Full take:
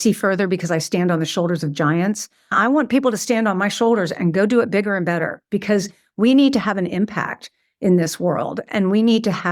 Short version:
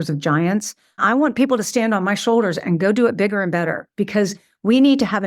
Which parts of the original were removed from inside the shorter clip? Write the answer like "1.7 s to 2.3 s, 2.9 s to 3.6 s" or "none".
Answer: none